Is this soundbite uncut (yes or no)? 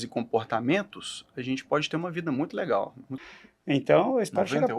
no